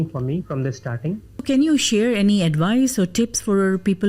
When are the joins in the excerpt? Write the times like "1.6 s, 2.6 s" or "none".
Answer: 1.4 s